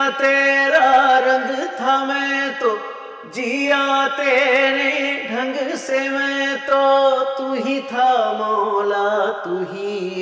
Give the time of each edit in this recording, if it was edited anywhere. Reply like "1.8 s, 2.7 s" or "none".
none